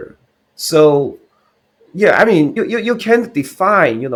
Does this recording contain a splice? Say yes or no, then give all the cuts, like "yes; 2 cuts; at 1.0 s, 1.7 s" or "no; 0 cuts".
no; 0 cuts